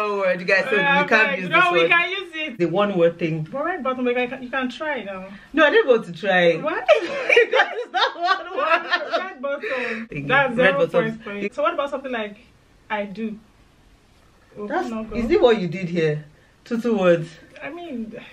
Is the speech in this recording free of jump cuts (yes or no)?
no